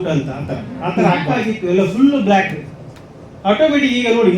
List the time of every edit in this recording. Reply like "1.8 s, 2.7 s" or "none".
1.5 s